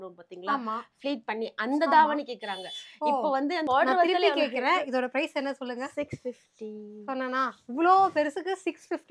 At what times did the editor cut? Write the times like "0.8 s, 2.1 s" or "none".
3.7 s